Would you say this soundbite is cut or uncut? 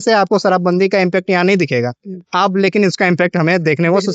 uncut